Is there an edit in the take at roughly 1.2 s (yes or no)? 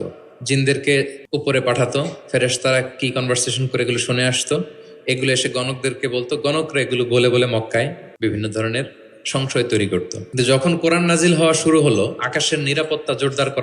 yes